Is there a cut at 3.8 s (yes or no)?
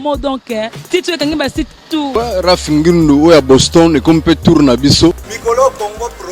no